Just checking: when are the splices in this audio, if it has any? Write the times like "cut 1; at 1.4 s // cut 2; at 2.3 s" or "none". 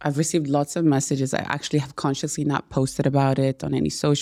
none